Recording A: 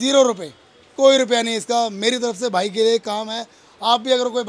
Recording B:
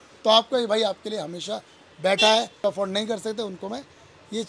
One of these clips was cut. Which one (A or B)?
B